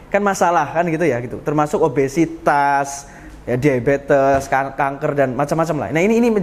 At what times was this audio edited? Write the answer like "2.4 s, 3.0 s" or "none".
none